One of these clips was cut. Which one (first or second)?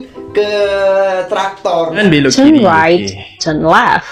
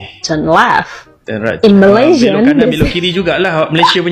first